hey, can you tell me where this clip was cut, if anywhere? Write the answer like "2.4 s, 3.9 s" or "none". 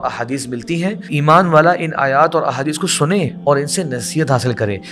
1.1 s, 3.3 s